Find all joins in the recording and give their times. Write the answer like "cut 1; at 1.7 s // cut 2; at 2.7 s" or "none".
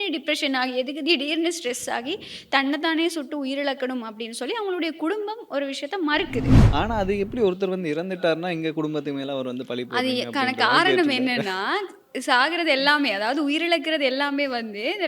cut 1; at 6.6 s